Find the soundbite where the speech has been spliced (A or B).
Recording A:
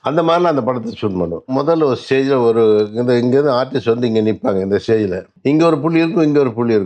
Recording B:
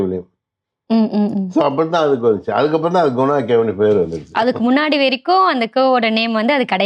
A